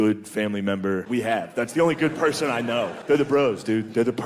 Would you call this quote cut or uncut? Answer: cut